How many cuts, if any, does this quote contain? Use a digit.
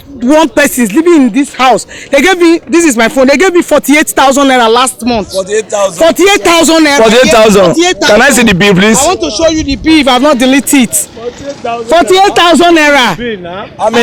0